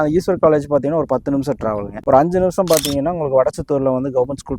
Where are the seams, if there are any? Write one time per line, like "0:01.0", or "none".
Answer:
none